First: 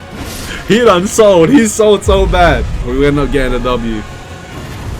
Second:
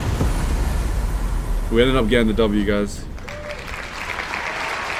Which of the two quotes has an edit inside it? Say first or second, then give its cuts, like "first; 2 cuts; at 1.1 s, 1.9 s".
first; 1 cut; at 2.7 s